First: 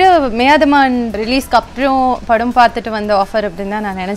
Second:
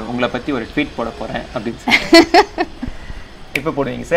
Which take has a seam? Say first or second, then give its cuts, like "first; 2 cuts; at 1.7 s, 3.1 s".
first; 1 cut; at 1.2 s